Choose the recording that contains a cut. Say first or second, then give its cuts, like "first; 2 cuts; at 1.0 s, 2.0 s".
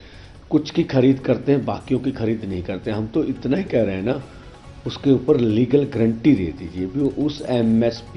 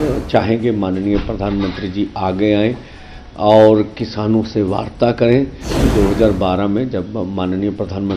second; 1 cut; at 5.8 s